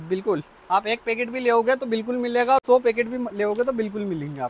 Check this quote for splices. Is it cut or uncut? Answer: uncut